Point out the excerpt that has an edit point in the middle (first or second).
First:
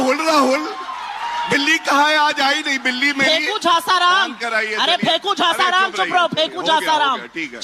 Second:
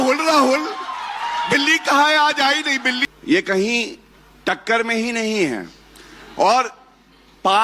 second